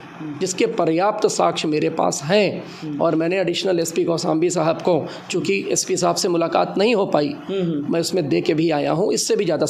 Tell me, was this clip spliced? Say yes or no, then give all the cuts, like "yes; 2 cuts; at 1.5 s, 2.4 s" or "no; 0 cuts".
no; 0 cuts